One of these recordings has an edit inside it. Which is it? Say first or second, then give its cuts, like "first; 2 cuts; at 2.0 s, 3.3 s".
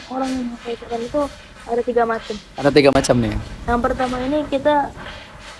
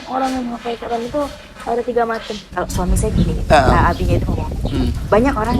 second; 1 cut; at 2.4 s